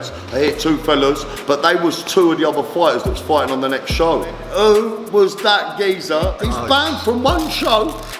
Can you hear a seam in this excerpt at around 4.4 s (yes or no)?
yes